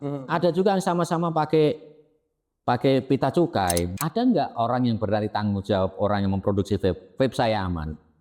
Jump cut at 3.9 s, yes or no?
yes